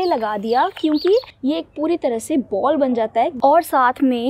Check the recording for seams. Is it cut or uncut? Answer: cut